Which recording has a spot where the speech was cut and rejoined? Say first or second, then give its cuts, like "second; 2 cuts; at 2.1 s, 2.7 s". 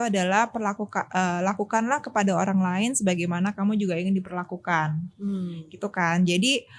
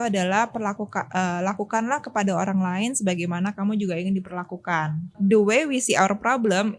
second; 1 cut; at 5.2 s